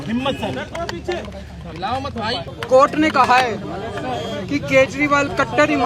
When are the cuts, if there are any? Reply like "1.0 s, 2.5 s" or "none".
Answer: 2.5 s